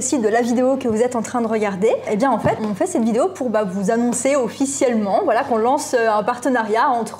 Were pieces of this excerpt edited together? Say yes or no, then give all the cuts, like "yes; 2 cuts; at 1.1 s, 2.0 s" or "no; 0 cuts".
yes; 1 cut; at 2.5 s